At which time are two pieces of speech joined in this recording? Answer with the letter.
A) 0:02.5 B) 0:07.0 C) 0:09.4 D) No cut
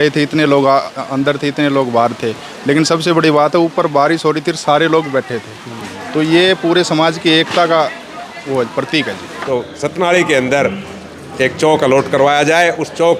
C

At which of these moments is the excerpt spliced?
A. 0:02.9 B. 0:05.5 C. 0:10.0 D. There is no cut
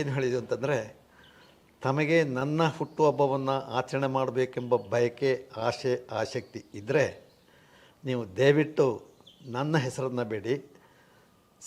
D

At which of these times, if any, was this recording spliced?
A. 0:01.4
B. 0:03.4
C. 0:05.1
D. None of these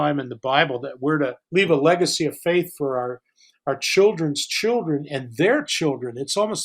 A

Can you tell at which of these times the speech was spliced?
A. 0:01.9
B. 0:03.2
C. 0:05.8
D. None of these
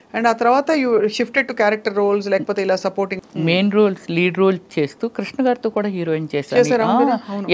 B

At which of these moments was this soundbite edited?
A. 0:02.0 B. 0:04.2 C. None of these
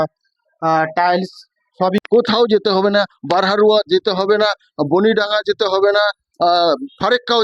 A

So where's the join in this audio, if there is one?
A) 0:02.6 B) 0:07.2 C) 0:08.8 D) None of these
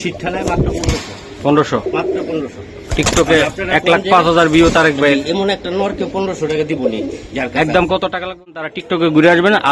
C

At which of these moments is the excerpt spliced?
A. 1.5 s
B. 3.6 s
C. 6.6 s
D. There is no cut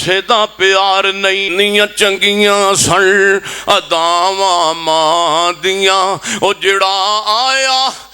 A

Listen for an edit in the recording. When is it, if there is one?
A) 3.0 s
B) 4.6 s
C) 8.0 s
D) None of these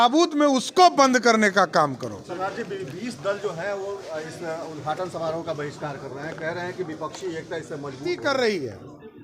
C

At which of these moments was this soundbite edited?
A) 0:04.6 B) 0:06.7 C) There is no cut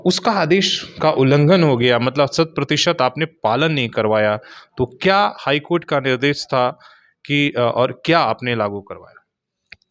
C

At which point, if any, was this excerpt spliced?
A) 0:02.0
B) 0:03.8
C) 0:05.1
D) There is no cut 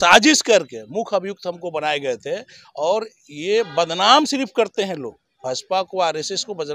D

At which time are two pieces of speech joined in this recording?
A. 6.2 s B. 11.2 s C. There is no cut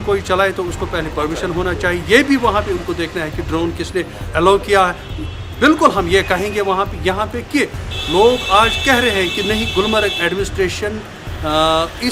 C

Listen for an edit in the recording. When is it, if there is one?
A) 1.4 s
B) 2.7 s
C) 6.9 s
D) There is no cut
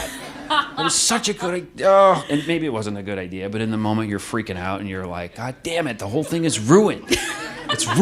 D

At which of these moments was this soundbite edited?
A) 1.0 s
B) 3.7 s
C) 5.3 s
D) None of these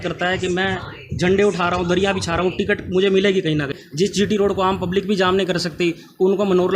B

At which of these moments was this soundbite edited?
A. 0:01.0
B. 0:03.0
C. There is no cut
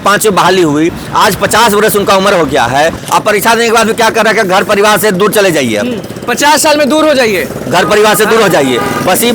B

